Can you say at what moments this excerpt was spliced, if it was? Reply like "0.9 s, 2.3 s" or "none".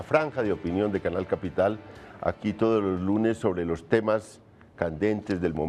1.7 s